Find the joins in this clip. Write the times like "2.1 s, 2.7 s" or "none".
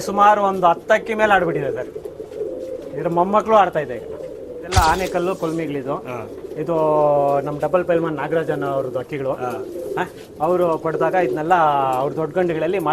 4.7 s